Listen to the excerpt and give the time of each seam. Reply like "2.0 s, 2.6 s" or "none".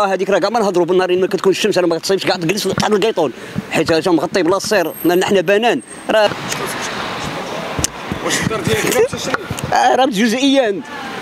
6.3 s